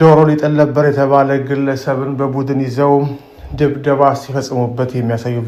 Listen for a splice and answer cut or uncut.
uncut